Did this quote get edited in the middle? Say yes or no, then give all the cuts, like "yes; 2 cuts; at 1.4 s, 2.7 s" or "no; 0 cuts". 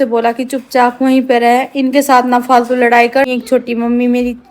yes; 1 cut; at 3.3 s